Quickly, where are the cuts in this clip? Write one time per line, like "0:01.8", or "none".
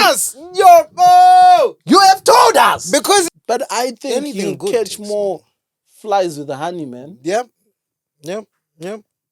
0:03.3